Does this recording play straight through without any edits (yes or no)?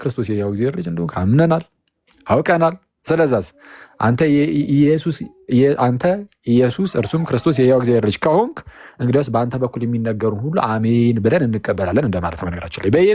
yes